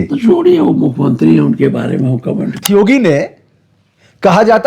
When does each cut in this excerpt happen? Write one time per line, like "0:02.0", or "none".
0:02.6